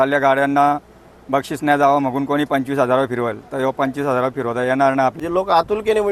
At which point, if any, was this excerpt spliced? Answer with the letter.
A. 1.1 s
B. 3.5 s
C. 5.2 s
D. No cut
C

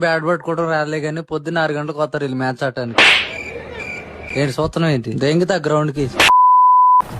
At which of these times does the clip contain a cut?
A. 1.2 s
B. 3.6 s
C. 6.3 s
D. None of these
C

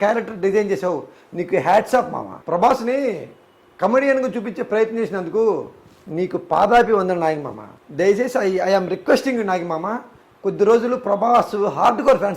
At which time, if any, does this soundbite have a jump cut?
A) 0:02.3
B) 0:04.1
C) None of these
A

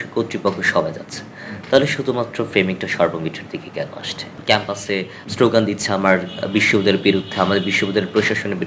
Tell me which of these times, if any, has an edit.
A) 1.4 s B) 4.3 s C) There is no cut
B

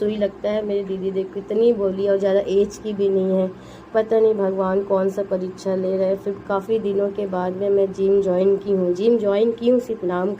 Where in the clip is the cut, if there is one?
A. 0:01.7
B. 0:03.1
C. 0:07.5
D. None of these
D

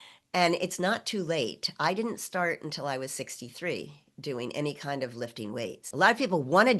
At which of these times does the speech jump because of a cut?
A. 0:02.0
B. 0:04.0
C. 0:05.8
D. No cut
C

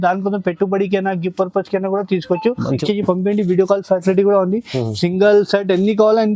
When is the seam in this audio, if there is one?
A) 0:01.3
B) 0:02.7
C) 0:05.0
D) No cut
B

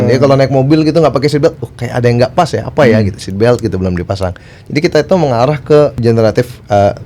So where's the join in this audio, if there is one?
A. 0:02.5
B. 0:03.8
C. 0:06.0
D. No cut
C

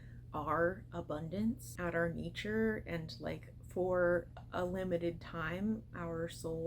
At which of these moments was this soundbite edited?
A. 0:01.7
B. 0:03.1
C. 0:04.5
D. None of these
A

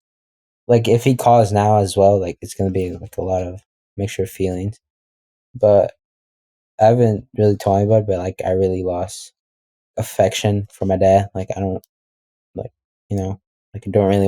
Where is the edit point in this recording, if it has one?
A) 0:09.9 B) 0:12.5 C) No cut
A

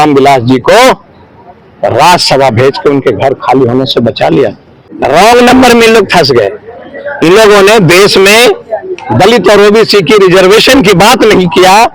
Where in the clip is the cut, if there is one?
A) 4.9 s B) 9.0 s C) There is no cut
A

